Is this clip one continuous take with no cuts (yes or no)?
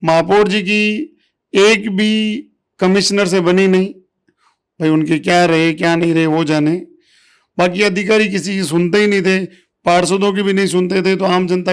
yes